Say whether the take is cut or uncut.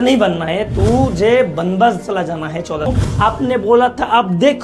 cut